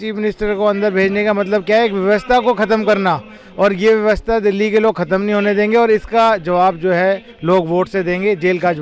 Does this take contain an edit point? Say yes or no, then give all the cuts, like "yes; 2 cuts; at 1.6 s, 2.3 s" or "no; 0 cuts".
no; 0 cuts